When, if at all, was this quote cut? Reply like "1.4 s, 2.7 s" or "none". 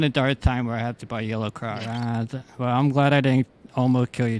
1.8 s